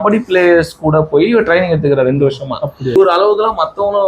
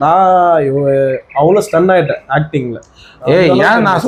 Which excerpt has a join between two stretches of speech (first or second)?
first